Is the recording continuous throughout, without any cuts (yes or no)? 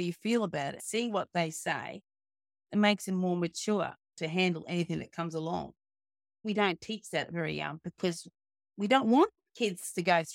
no